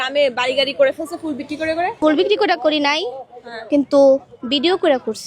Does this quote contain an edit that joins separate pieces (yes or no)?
yes